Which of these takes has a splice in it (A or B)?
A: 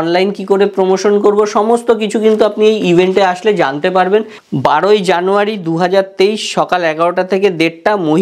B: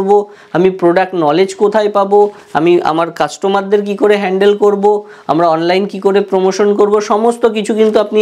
A